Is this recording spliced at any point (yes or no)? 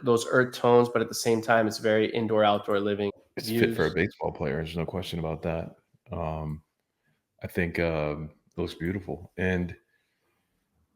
yes